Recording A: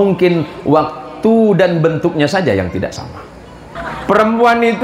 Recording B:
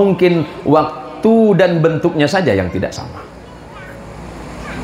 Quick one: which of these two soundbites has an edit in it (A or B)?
A